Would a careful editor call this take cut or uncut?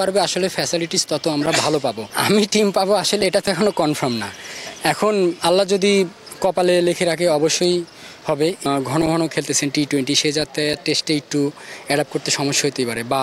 cut